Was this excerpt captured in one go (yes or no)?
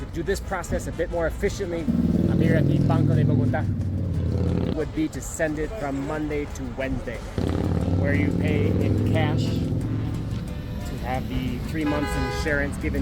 no